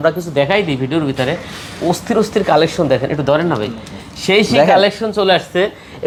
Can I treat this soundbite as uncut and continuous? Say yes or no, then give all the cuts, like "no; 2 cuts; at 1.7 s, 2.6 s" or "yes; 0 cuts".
yes; 0 cuts